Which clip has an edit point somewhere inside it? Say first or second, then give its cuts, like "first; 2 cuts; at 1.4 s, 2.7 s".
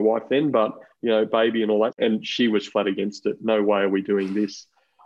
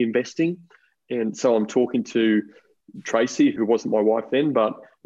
first; 1 cut; at 2.0 s